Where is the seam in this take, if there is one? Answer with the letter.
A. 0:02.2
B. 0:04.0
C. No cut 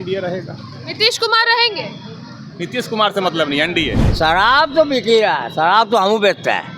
B